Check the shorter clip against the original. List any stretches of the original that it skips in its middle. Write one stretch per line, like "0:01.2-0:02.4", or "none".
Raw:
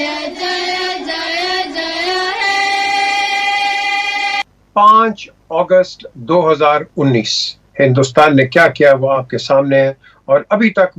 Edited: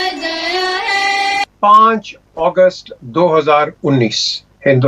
0:03.0-0:04.6